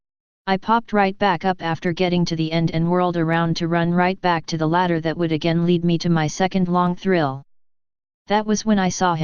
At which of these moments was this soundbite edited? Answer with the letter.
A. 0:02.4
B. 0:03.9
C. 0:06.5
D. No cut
B